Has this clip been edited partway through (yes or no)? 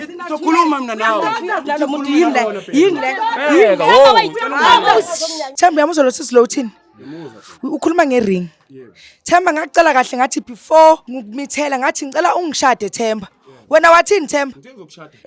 yes